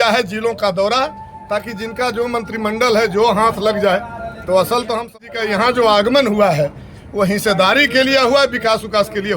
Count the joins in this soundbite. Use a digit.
1